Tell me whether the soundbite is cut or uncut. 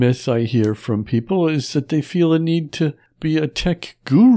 cut